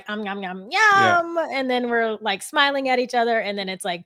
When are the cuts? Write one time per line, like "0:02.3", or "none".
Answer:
none